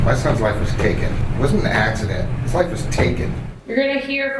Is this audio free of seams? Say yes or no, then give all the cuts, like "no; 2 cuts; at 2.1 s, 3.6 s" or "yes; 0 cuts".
no; 2 cuts; at 1.2 s, 3.5 s